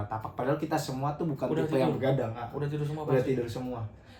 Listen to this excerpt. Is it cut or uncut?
uncut